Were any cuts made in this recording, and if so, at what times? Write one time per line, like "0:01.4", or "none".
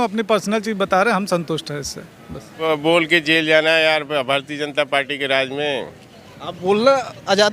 0:02.6